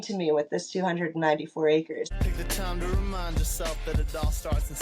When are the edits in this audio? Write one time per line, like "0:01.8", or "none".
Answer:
0:02.2

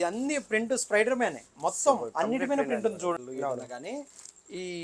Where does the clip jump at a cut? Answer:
0:03.2

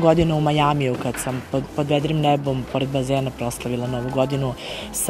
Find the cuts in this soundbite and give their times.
none

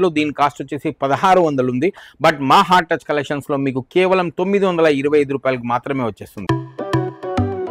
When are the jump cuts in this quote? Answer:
0:06.3

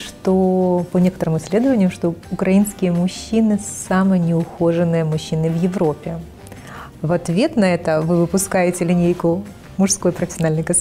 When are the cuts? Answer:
none

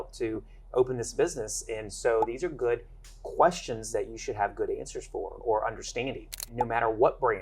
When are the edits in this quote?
0:06.5

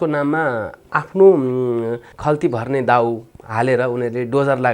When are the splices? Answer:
0:02.1

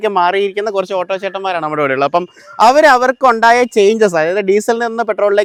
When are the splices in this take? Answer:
none

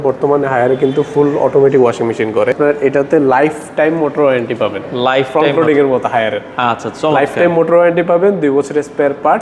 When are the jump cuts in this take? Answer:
0:02.6

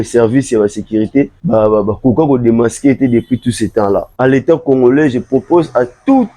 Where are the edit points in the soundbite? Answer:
0:04.1

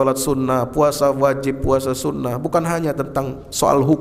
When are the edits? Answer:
none

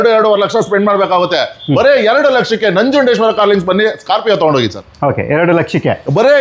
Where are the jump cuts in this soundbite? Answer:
none

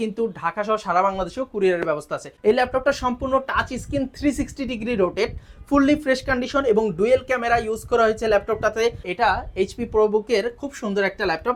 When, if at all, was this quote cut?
0:02.3
0:09.1

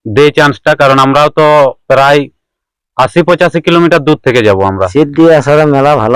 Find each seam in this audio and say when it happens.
0:04.9

